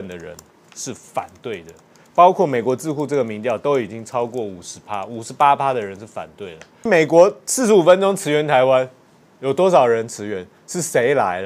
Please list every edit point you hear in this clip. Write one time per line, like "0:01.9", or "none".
0:06.9